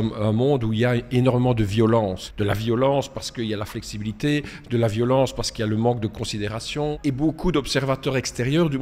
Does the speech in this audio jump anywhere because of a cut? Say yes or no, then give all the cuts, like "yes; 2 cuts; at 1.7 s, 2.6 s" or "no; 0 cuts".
yes; 2 cuts; at 2.3 s, 7.0 s